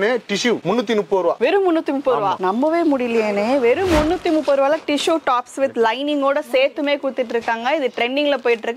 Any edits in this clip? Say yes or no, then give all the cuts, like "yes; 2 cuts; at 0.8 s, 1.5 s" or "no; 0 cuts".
no; 0 cuts